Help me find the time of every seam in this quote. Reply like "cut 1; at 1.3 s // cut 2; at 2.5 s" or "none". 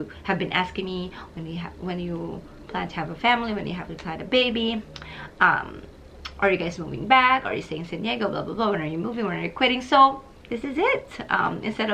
none